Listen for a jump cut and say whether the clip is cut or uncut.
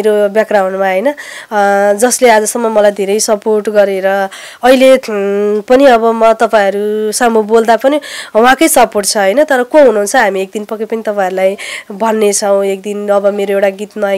uncut